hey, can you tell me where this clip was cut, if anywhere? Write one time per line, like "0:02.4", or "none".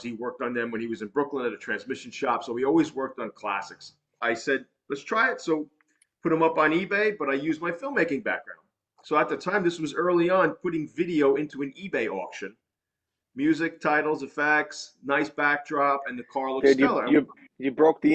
0:04.2